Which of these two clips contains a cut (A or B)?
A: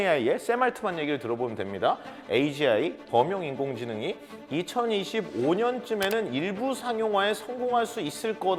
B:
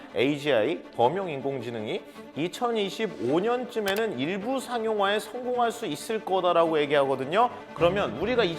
B